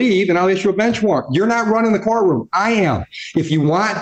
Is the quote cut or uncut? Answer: uncut